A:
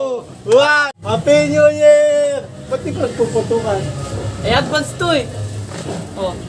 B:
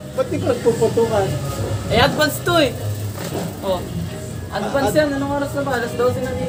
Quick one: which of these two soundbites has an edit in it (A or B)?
A